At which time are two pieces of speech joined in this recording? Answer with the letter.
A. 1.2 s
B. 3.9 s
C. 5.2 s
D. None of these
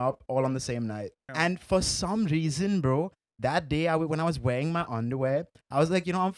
A